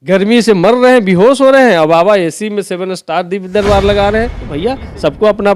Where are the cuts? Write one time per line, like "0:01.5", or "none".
0:04.4